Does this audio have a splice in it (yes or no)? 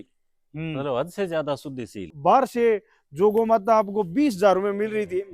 yes